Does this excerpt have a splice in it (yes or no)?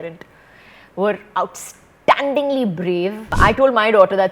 yes